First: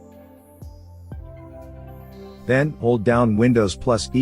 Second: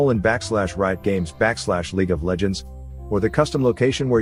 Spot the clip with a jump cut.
first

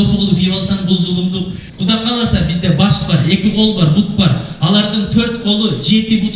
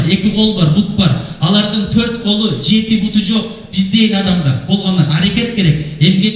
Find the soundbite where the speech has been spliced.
first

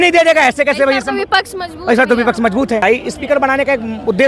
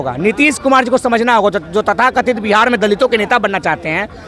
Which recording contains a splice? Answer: first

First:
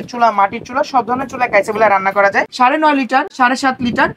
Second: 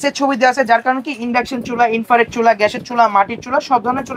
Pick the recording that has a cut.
first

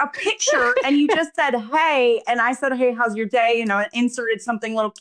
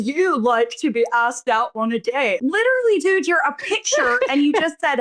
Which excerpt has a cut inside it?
second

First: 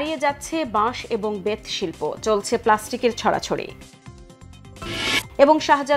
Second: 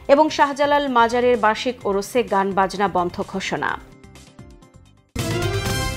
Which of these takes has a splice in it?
second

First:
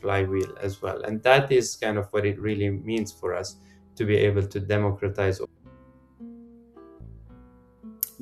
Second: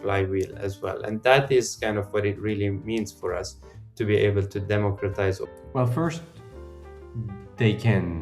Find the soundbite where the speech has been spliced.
second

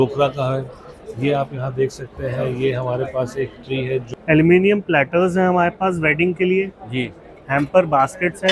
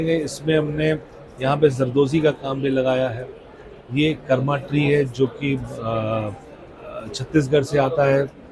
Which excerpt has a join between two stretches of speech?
first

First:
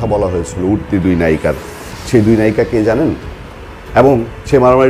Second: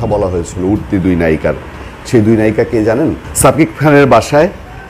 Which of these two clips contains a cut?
second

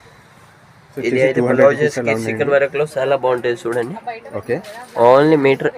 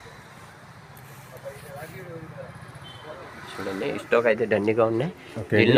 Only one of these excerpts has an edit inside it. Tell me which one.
first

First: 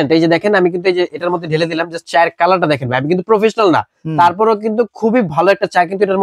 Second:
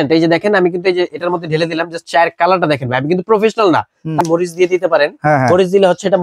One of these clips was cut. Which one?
second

